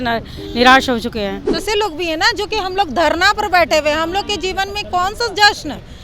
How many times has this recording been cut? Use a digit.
1